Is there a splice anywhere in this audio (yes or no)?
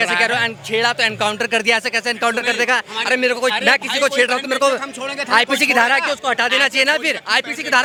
no